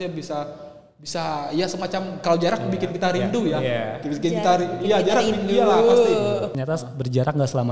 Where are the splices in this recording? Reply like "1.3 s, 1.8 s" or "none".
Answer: 6.5 s

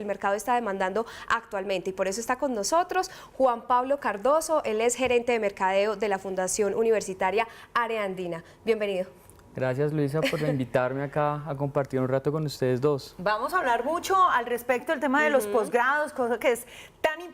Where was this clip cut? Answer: 1.6 s

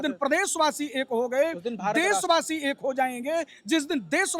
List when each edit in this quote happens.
none

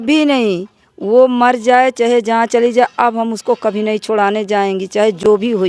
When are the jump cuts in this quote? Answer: none

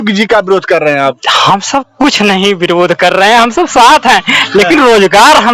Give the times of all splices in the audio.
none

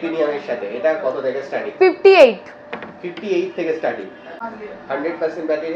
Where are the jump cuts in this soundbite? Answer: 4.4 s

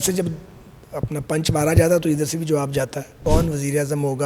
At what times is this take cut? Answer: 3.2 s

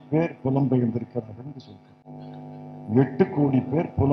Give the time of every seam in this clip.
none

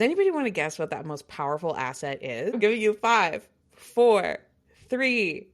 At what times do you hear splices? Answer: 2.6 s

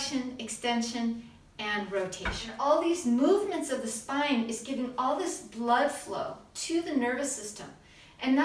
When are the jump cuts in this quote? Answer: 2.5 s

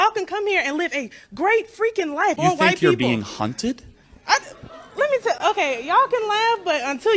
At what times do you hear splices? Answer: 2.4 s

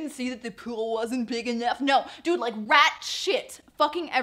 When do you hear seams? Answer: none

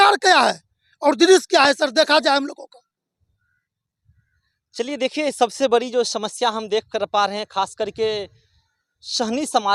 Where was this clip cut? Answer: none

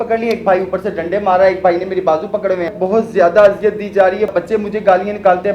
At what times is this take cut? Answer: 2.8 s, 4.3 s

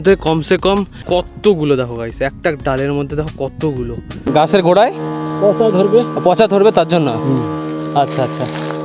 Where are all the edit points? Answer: 1.0 s, 4.3 s

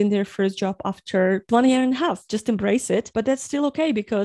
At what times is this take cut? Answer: 1.5 s, 2.3 s

